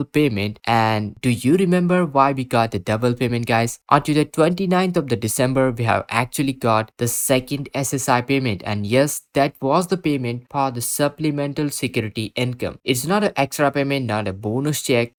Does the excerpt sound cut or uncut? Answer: uncut